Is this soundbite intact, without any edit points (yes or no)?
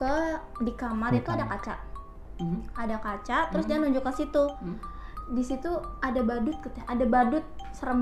yes